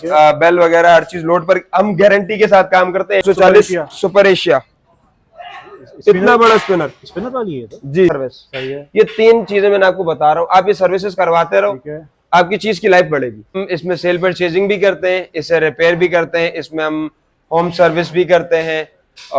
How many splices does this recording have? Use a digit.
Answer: 3